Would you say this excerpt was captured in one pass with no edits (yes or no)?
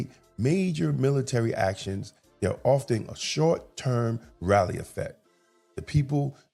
yes